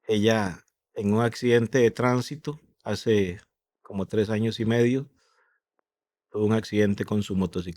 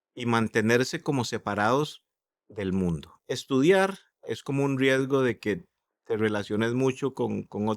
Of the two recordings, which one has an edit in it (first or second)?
second